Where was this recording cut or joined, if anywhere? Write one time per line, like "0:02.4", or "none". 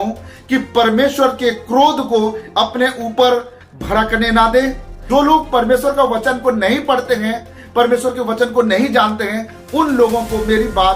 0:04.9